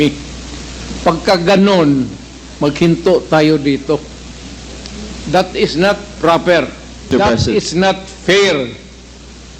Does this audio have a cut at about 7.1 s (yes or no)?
yes